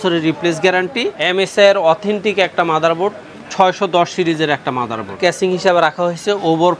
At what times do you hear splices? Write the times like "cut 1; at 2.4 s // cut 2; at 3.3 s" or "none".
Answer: cut 1; at 1.2 s // cut 2; at 5.1 s